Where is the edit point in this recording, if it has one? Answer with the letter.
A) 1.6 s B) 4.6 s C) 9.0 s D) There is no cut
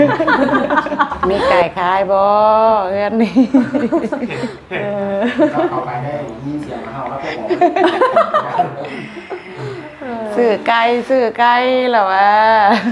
A